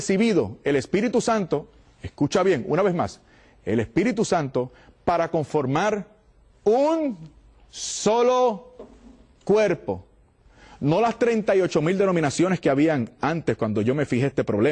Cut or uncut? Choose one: uncut